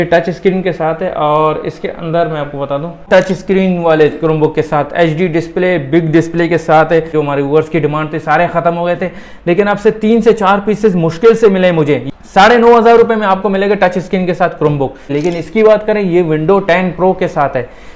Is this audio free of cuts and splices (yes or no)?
no